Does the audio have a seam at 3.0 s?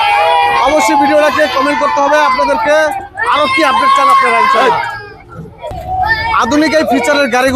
no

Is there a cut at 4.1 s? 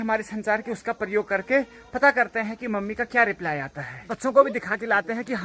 yes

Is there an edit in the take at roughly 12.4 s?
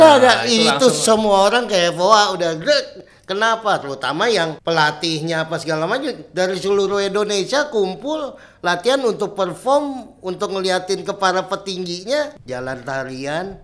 yes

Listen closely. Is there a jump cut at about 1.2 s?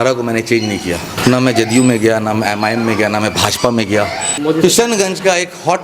yes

